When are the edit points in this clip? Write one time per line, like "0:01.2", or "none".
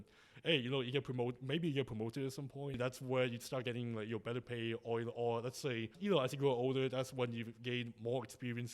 0:02.8
0:05.9